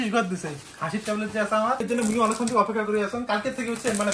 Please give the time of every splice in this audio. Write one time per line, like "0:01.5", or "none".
0:01.8